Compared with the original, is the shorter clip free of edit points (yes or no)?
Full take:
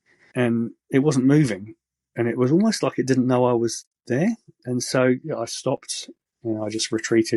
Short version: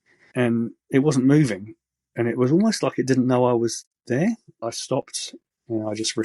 no